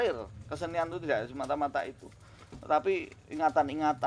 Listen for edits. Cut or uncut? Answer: uncut